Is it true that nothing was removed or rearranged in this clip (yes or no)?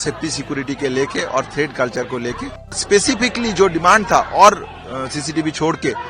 no